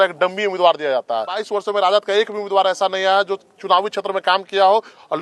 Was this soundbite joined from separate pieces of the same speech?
yes; 1 cut; at 1.4 s

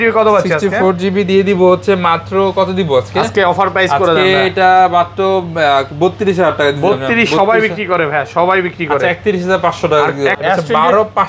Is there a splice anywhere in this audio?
yes; 1 cut; at 10.4 s

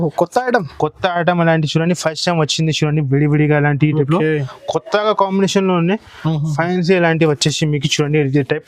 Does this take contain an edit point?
no; 0 cuts

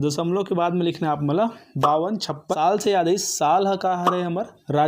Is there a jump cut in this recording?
yes; 1 cut; at 2.5 s

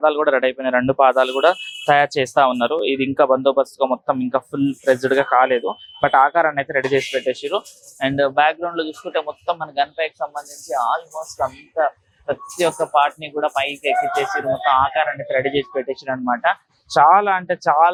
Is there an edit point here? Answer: no; 0 cuts

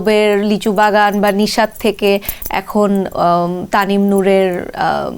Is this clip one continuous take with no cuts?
yes; 0 cuts

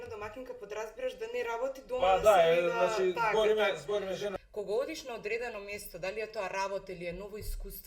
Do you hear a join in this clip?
yes; 1 cut; at 4.3 s

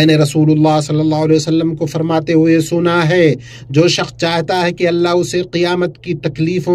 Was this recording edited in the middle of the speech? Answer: no; 0 cuts

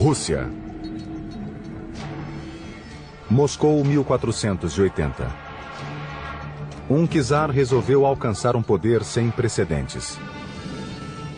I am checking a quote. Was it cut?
yes; 1 cut; at 7.6 s

